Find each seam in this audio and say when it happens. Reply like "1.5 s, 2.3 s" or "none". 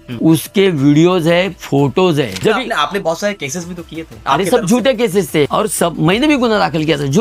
2.4 s, 5.5 s